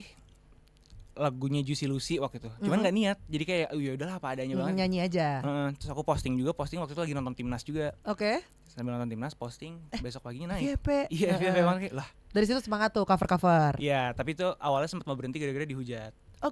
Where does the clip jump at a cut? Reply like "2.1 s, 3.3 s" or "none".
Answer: none